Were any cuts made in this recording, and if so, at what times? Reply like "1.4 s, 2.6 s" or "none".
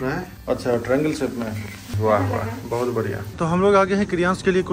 1.9 s, 3.3 s